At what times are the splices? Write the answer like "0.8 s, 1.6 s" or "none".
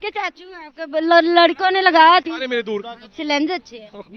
2.8 s